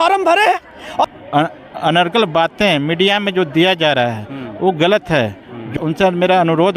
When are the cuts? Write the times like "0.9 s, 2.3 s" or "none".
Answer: 1.0 s, 5.7 s